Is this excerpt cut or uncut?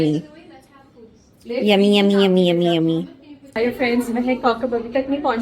cut